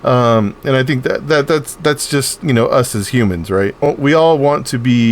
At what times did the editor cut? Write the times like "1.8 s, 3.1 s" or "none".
3.9 s